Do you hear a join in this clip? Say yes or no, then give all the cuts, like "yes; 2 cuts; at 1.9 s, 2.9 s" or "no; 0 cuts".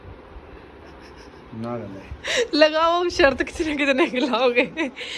no; 0 cuts